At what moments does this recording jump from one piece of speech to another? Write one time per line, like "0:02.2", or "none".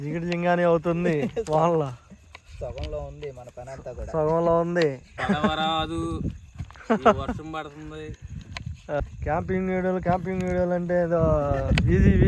0:05.2
0:09.0